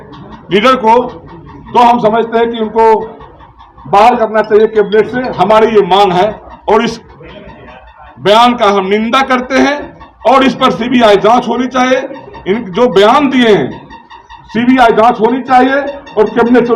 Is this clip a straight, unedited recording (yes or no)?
yes